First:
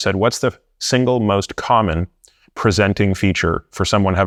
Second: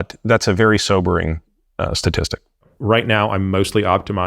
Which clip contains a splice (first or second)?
second